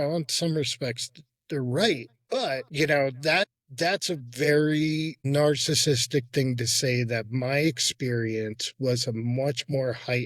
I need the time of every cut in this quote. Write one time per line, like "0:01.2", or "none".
0:02.7
0:03.6
0:05.2